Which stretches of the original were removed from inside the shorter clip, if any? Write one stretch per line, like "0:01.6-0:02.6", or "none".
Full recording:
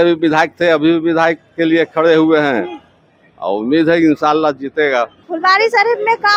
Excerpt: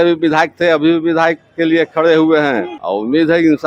0:02.8-0:03.3